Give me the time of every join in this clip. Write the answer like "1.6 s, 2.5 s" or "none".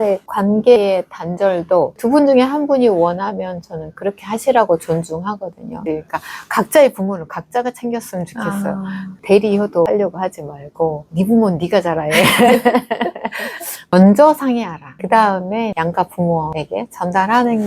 5.7 s, 13.9 s